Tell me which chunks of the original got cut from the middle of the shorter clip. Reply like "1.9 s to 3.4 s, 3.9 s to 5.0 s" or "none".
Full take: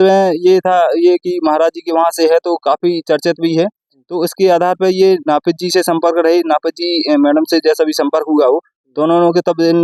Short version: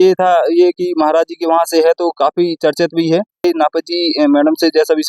3.9 s to 6.3 s